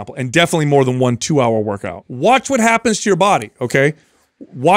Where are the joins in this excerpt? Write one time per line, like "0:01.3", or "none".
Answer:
0:02.0